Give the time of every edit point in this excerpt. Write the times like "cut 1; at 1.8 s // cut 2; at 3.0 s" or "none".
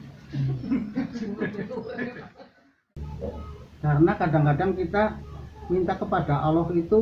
cut 1; at 3.0 s